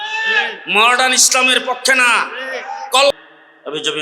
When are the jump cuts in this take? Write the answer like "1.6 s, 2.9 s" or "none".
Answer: 3.1 s